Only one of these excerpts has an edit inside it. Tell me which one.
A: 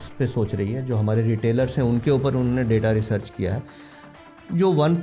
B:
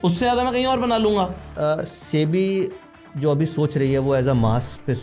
B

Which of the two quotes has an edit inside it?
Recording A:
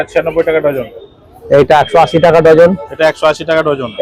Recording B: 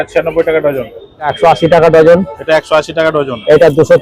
B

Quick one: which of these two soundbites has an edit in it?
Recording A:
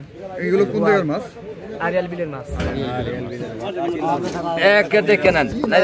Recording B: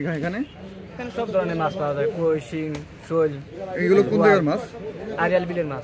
A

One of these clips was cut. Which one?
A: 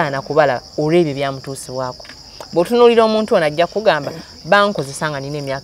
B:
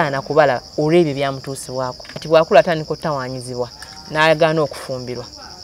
B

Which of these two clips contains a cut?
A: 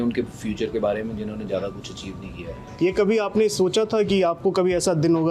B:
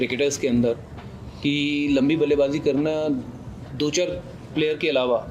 A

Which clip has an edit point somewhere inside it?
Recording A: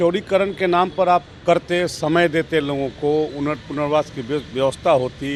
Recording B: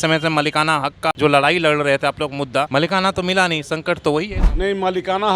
B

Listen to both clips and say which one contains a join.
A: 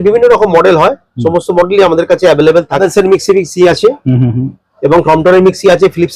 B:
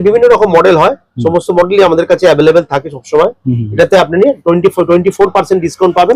A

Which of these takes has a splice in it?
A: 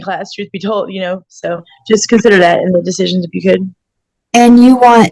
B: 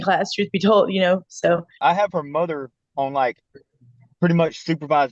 B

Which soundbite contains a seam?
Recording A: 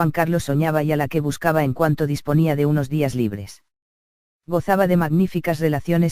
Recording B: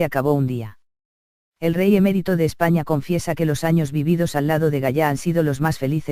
A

